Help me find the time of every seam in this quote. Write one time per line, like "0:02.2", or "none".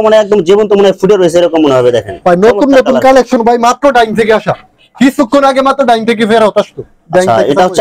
none